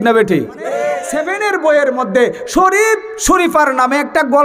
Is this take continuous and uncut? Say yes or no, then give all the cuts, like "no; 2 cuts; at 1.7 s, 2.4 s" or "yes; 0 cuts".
no; 1 cut; at 1.1 s